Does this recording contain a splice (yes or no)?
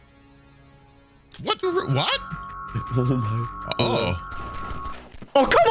yes